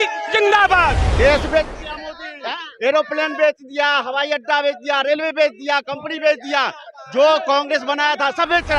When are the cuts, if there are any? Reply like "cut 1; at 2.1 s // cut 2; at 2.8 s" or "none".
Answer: cut 1; at 1.1 s